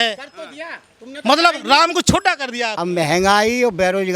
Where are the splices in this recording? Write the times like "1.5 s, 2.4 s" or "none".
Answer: 2.7 s